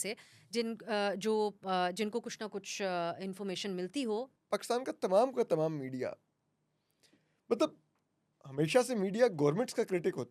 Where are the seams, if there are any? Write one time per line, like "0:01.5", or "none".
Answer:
0:04.3